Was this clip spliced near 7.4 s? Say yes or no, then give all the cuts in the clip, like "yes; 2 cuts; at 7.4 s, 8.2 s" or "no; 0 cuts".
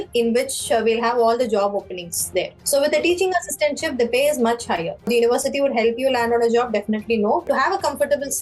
yes; 3 cuts; at 2.6 s, 5.1 s, 7.4 s